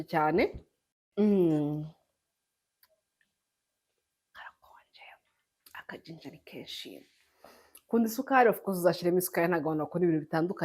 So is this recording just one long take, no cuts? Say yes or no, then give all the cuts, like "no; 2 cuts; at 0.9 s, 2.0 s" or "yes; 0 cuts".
no; 1 cut; at 1.1 s